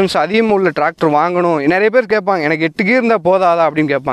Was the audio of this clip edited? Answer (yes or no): no